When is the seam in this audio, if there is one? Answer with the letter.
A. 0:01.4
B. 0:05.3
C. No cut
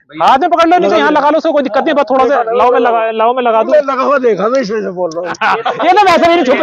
B